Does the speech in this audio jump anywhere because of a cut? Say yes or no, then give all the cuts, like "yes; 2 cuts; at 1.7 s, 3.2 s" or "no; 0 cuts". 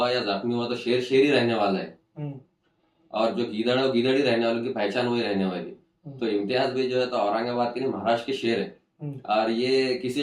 no; 0 cuts